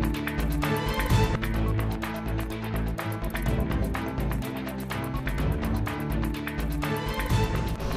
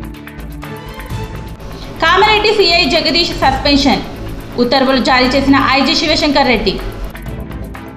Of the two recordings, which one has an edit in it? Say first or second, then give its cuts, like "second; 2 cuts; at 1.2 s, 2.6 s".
second; 1 cut; at 1.3 s